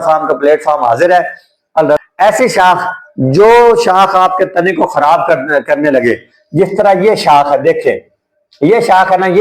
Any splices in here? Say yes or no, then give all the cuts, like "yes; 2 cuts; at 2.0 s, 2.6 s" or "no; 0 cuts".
yes; 1 cut; at 2.0 s